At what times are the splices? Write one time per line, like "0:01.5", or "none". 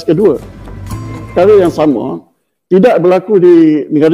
0:01.1